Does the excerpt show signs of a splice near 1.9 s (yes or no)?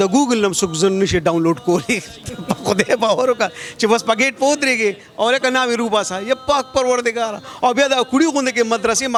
no